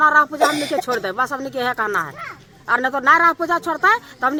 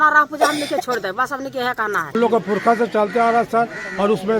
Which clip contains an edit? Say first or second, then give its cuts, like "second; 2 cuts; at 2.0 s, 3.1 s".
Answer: second; 1 cut; at 2.2 s